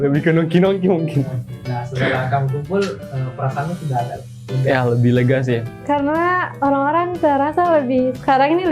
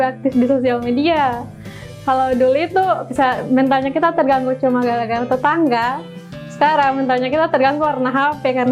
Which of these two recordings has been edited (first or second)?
first